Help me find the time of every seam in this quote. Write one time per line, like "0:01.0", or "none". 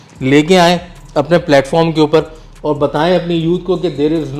none